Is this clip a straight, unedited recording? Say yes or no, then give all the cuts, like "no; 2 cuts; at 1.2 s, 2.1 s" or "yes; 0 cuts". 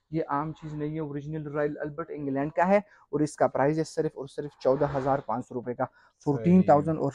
yes; 0 cuts